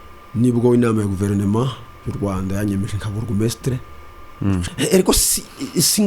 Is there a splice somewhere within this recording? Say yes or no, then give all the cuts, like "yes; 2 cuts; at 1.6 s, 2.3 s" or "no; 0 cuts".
yes; 1 cut; at 4.6 s